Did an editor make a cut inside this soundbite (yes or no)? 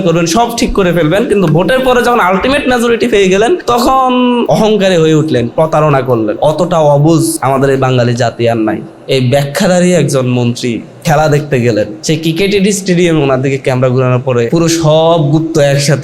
yes